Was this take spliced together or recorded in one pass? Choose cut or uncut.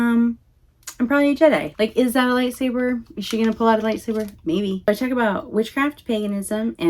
cut